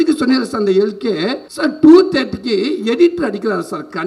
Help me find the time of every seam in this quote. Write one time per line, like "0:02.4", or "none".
0:01.4